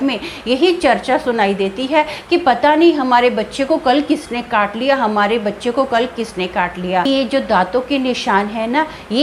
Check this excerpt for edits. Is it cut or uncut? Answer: cut